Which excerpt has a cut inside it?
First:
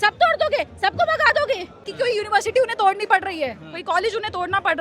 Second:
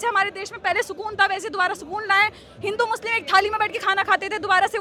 first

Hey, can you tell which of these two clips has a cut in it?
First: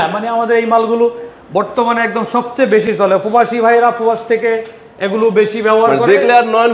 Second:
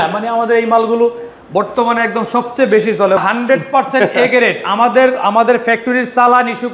second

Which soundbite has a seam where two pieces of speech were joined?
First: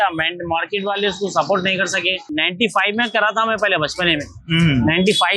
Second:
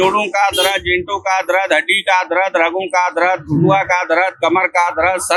first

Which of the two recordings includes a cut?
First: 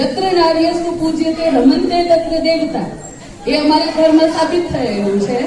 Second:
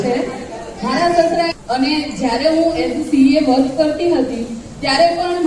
second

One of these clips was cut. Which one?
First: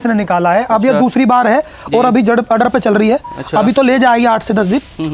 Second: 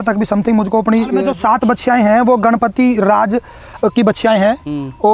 second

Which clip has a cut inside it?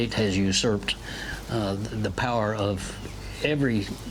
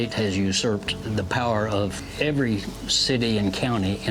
second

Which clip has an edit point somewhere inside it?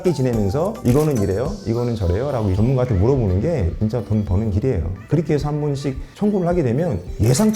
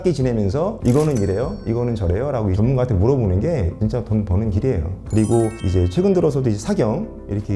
first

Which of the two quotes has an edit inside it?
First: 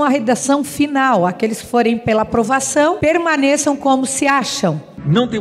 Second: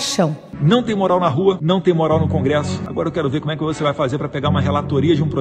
first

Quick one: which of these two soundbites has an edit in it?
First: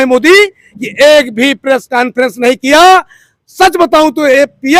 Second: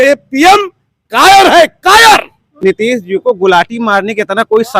second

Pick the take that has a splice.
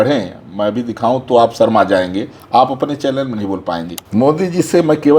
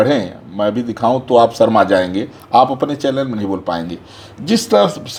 first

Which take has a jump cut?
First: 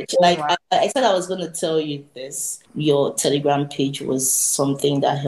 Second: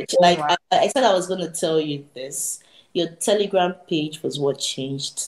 first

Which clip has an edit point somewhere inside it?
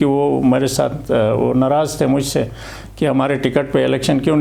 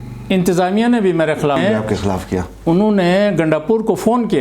second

